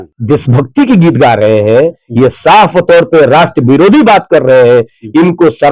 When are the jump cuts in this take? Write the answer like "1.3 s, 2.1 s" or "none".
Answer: none